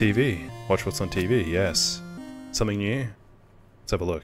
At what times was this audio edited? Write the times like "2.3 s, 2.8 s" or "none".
none